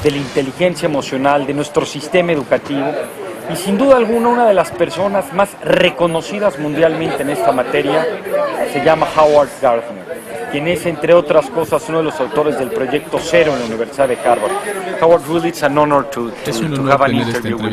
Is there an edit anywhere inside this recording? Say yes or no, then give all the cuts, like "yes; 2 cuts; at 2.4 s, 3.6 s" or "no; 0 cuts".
no; 0 cuts